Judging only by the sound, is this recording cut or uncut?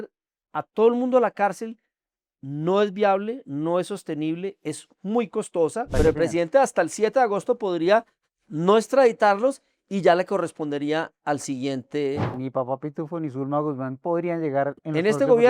cut